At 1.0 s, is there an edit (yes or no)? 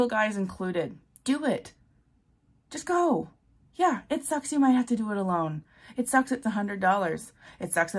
yes